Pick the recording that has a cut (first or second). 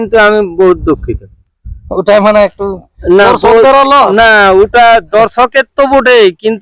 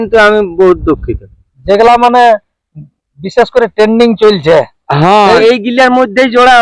second